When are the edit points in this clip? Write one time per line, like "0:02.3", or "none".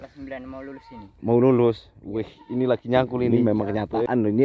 0:03.5